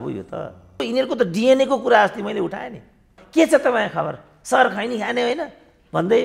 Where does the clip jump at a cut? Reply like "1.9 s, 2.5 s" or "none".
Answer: 0.8 s, 3.2 s